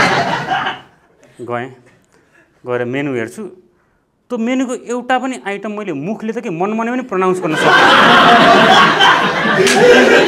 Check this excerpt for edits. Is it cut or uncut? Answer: uncut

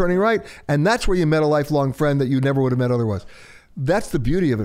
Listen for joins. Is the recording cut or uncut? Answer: uncut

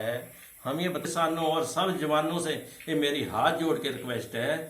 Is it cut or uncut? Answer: cut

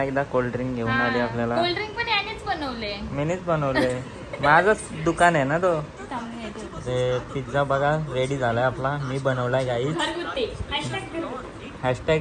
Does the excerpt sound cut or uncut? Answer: uncut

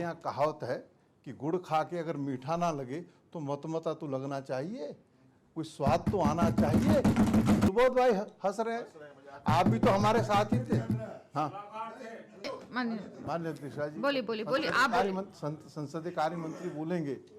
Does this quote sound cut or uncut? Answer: cut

